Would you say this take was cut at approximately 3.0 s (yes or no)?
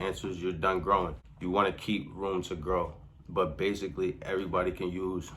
no